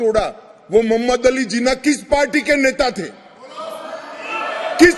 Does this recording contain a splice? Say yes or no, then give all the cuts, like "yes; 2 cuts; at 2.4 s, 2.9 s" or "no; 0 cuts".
no; 0 cuts